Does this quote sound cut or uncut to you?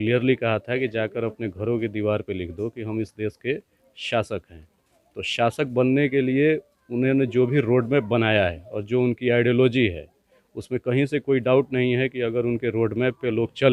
uncut